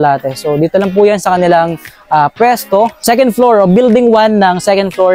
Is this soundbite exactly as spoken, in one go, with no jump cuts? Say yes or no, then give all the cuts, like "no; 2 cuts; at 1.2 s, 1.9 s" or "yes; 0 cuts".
no; 1 cut; at 3.0 s